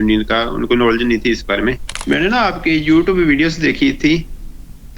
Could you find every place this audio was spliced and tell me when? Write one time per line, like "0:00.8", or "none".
0:01.9